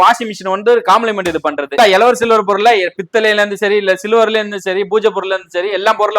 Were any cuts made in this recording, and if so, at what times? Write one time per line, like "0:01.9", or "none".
0:01.7